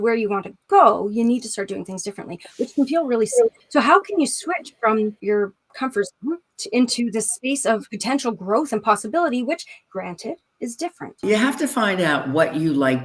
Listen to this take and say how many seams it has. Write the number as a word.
six